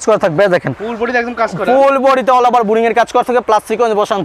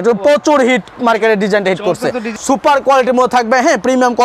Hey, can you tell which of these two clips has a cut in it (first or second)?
second